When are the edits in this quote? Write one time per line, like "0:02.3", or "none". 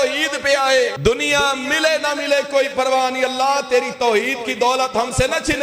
0:01.0